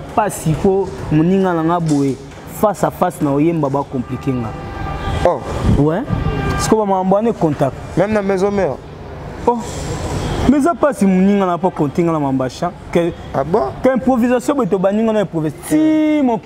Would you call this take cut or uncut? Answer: uncut